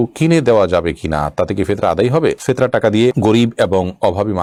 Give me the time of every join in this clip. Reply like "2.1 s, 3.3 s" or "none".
none